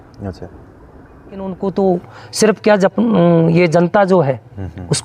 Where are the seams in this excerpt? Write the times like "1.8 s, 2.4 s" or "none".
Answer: 1.5 s